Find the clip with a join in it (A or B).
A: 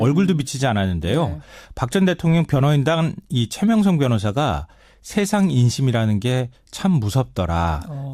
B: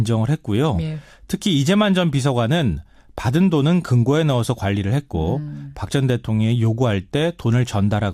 A